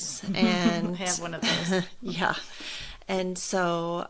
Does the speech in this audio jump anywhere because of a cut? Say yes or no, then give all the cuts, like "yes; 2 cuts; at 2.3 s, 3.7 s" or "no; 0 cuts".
no; 0 cuts